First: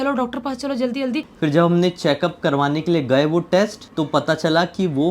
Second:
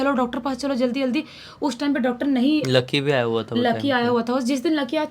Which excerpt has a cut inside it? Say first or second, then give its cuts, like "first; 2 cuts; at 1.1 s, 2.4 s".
first; 2 cuts; at 1.3 s, 3.8 s